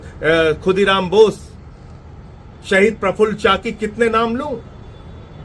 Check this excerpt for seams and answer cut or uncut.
uncut